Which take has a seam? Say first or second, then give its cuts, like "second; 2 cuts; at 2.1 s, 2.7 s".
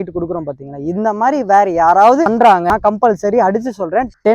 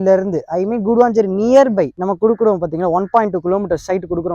first; 1 cut; at 2.7 s